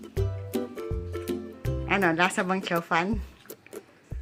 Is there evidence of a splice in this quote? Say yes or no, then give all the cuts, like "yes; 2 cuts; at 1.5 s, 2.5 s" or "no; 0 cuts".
yes; 2 cuts; at 1.8 s, 3.2 s